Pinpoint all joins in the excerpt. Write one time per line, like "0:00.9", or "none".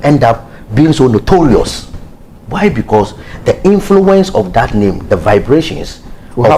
none